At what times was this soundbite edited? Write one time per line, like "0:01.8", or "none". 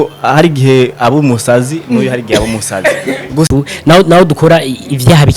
0:03.5